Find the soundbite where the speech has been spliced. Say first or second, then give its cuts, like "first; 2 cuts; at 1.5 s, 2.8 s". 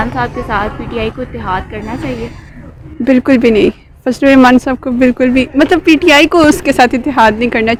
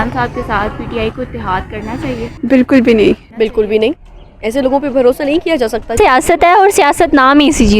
second; 3 cuts; at 2.3 s, 3.3 s, 5.9 s